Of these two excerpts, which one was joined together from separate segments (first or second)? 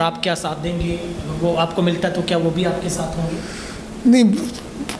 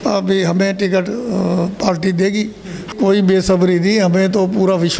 second